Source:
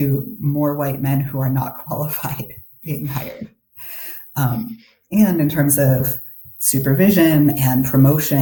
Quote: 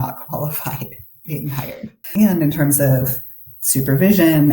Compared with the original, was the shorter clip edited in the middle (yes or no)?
yes